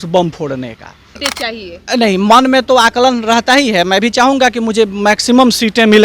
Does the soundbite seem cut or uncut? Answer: cut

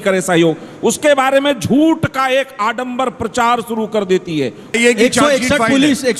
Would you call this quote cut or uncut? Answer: cut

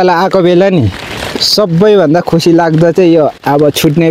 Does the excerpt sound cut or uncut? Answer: uncut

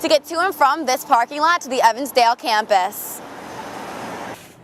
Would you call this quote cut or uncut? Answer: uncut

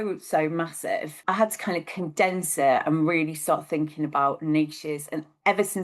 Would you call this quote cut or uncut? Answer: cut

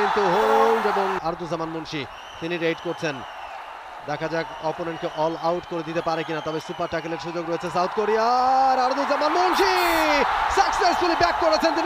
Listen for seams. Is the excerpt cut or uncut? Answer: cut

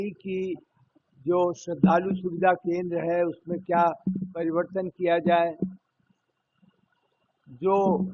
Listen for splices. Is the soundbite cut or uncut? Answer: uncut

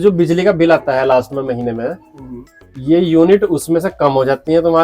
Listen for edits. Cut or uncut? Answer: uncut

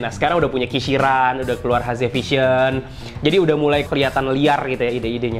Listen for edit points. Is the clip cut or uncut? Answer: cut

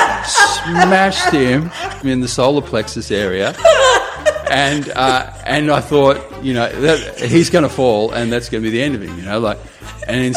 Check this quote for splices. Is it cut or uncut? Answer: cut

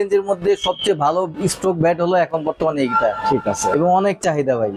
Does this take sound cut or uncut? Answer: uncut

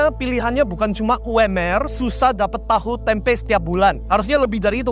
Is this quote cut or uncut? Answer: uncut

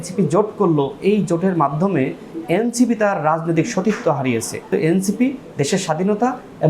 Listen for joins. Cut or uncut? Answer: cut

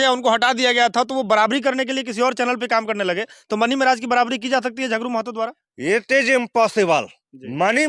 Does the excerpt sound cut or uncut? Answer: uncut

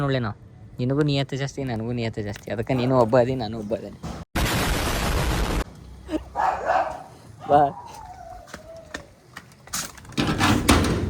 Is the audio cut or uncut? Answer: uncut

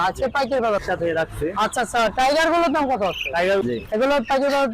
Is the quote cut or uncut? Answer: cut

